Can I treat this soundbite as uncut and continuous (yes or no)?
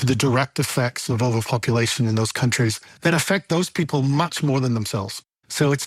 yes